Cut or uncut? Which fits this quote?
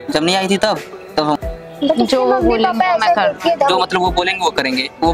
cut